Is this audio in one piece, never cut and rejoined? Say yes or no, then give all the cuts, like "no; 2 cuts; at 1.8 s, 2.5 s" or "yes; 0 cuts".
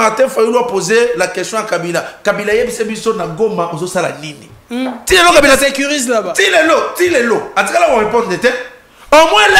yes; 0 cuts